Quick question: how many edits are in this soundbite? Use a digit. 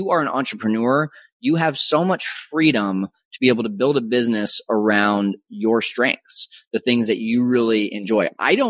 0